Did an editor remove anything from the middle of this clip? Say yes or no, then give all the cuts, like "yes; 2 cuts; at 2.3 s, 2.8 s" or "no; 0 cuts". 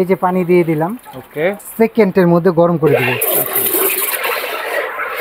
yes; 1 cut; at 1.6 s